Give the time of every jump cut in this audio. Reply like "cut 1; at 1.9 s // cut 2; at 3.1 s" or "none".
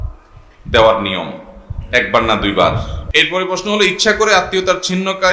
cut 1; at 2.9 s